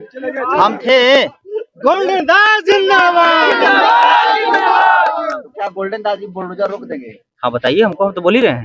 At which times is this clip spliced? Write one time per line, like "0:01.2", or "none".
0:05.4